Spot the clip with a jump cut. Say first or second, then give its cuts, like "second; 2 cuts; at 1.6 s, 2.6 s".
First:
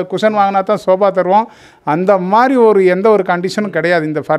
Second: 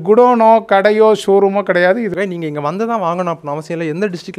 second; 1 cut; at 2.1 s